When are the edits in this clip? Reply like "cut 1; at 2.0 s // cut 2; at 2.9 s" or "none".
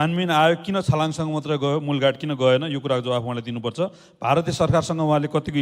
none